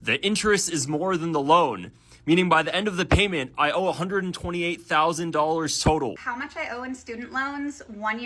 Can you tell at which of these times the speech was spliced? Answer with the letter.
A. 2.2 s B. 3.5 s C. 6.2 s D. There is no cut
C